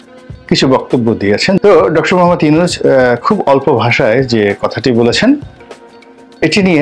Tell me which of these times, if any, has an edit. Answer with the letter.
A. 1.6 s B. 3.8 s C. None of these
A